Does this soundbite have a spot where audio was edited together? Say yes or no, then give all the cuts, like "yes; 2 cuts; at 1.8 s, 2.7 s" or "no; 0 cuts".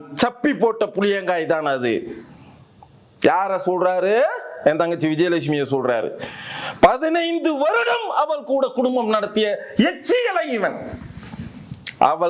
no; 0 cuts